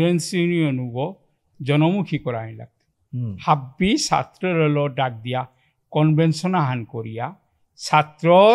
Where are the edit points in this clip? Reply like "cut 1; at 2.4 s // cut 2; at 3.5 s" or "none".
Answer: none